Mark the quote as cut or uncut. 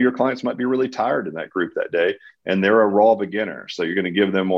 uncut